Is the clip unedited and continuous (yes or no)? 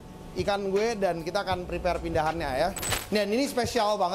no